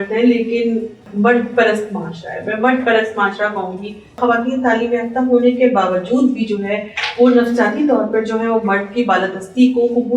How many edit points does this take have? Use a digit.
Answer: 2